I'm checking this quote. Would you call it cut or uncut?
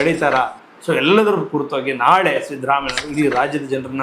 uncut